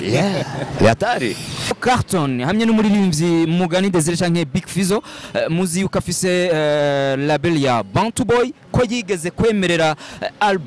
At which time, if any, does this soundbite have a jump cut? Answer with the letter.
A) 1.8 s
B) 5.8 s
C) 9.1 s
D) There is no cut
A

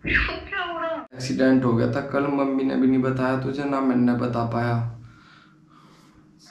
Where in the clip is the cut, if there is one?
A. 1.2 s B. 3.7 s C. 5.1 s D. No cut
A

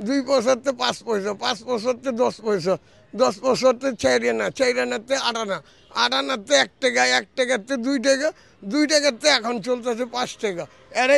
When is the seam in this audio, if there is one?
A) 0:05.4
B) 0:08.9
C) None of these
C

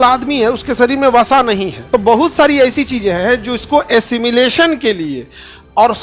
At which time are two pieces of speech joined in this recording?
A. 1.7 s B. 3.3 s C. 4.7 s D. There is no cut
A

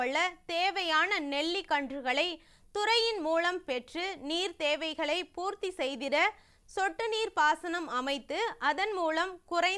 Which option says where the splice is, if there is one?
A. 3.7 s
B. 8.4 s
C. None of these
A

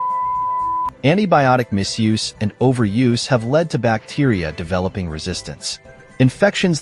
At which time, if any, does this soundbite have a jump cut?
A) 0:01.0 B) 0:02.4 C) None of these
A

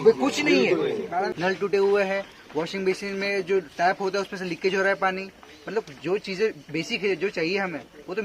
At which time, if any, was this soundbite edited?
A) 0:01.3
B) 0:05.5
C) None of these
A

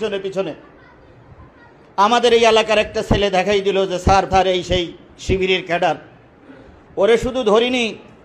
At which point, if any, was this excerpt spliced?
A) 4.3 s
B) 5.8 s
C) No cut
A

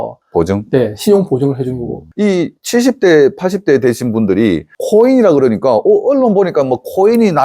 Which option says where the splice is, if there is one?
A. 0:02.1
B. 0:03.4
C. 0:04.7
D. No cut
A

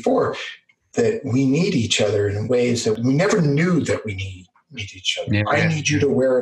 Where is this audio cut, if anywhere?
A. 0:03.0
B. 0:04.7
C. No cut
A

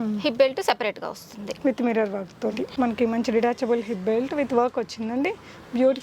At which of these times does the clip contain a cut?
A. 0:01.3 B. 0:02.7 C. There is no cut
B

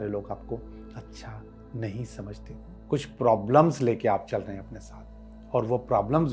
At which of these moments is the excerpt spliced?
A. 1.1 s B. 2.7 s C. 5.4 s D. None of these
B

